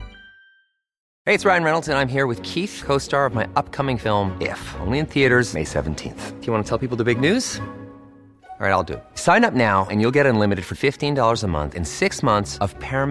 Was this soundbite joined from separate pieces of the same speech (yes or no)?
yes